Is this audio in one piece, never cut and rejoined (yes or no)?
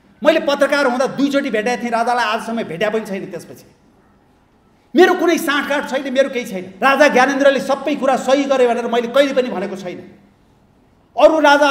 no